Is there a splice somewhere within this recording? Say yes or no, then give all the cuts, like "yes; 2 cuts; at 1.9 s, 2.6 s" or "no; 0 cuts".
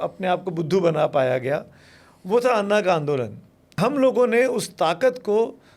yes; 1 cut; at 3.8 s